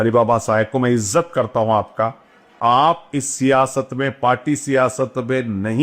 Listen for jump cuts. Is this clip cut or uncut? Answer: cut